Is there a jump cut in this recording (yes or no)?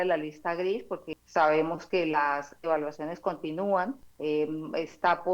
yes